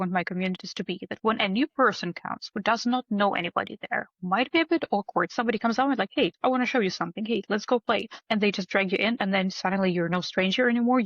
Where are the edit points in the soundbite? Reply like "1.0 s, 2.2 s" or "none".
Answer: 5.3 s, 6.3 s, 8.1 s